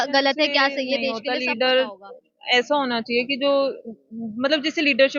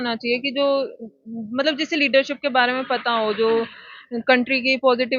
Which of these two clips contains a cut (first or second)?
first